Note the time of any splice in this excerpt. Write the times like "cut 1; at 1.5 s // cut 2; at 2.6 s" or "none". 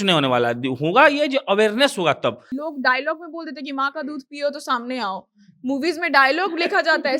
cut 1; at 2.5 s